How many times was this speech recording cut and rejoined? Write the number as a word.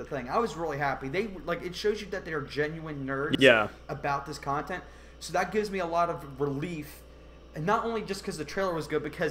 zero